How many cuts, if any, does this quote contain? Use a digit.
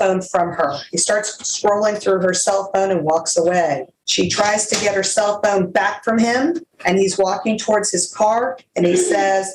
2